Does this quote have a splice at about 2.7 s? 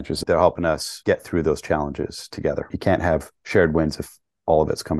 yes; 1 cut; at 2.7 s

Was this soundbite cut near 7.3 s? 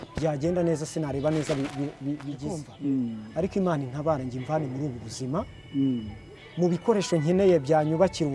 no; 1 cut; at 2.6 s

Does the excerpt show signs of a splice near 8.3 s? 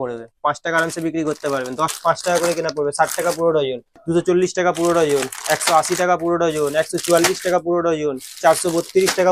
no; 2 cuts; at 1.9 s, 4.0 s

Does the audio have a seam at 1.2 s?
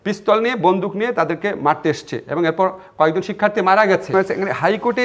no; 1 cut; at 4.1 s

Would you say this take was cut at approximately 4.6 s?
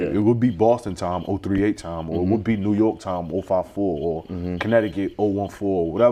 no; 0 cuts

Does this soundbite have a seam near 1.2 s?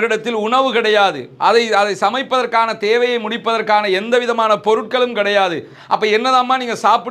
no; 0 cuts

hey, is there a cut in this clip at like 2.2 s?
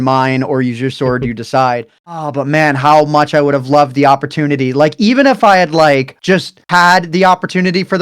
yes; 1 cut; at 2.2 s

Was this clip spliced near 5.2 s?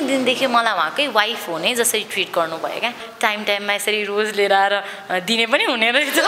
no; 1 cut; at 3.1 s

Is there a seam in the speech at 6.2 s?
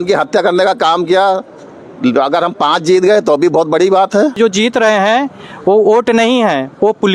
no; 1 cut; at 4.4 s

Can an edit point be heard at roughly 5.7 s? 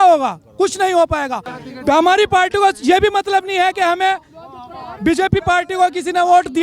no; 1 cut; at 1.5 s

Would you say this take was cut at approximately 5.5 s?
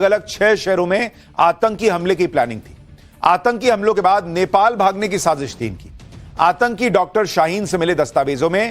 yes; 1 cut; at 5.5 s

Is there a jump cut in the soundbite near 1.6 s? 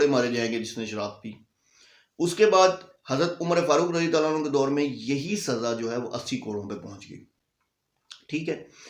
no; 0 cuts

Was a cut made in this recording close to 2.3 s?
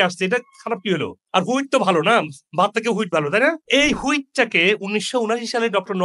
no; 1 cut; at 3.6 s

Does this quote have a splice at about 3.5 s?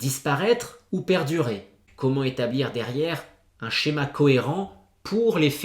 no; 1 cut; at 1.8 s

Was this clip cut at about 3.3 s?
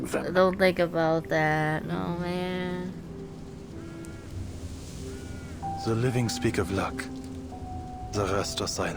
no; 0 cuts

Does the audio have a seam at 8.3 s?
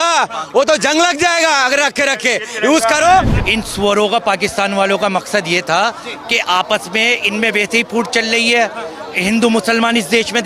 no; 1 cut; at 3.4 s

